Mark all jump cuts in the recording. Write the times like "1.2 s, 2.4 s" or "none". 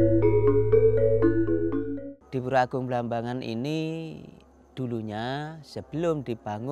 1.8 s